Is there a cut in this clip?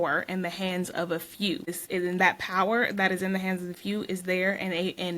yes; 1 cut; at 1.8 s

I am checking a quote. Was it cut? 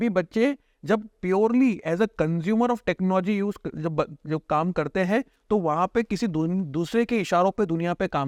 no; 0 cuts

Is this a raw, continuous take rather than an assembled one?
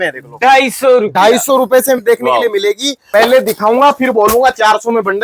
no; 1 cut; at 2.9 s

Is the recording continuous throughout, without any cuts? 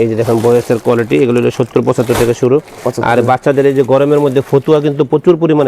yes; 0 cuts

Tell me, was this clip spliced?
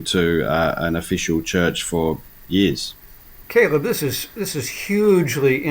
yes; 1 cut; at 3.4 s

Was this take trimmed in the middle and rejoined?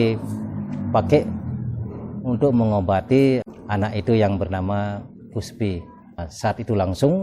yes; 2 cuts; at 3.4 s, 6.3 s

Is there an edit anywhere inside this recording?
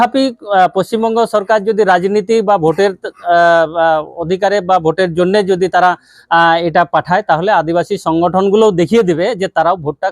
no; 0 cuts

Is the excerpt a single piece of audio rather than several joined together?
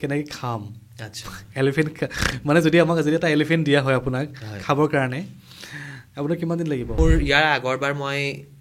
no; 1 cut; at 7.0 s

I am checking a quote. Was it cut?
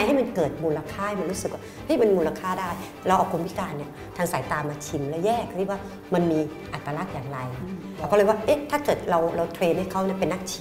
yes; 1 cut; at 7.9 s

